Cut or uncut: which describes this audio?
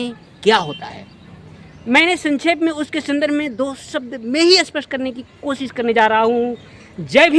uncut